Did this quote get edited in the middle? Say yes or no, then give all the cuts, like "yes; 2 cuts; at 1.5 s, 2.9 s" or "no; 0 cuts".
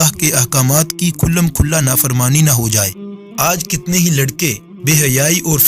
yes; 2 cuts; at 3.5 s, 4.7 s